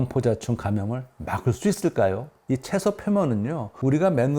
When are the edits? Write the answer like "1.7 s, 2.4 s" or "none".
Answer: 2.3 s